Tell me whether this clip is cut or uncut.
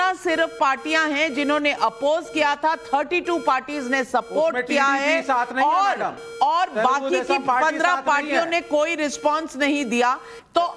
uncut